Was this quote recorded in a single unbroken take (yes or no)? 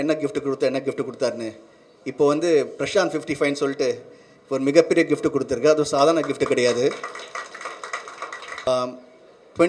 no